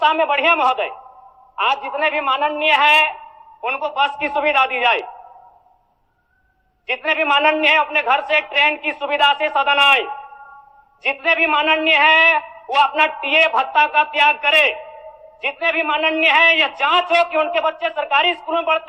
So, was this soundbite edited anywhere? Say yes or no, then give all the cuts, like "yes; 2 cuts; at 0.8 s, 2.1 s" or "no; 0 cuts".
no; 0 cuts